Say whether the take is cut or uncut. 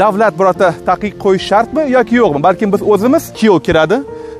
cut